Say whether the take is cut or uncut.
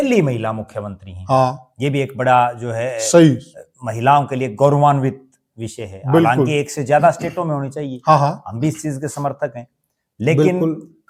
uncut